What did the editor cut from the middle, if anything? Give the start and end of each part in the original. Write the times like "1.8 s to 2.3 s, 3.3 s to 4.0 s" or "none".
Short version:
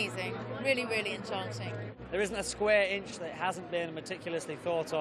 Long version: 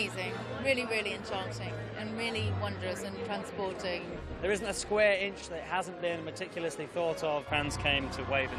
1.9 s to 4.2 s